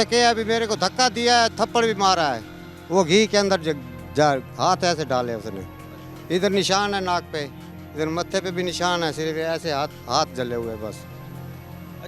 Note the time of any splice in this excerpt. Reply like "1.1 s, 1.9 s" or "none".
none